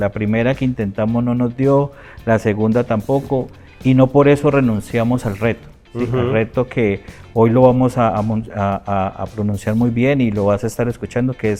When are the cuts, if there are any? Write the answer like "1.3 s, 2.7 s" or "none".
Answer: none